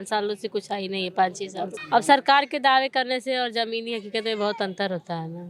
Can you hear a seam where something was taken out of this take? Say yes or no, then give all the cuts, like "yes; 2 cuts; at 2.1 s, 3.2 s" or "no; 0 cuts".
yes; 1 cut; at 1.8 s